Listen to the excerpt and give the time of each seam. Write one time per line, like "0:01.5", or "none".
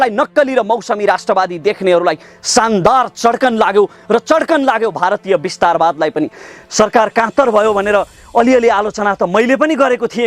none